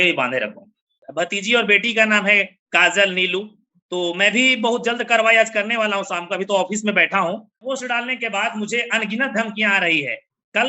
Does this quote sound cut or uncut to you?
cut